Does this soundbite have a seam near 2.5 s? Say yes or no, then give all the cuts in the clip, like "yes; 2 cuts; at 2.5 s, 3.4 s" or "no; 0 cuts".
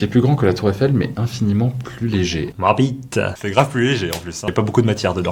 yes; 2 cuts; at 2.5 s, 3.4 s